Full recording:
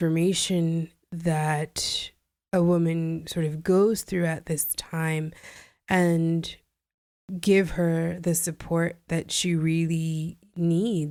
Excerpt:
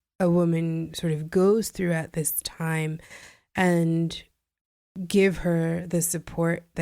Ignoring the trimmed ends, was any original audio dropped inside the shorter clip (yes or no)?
no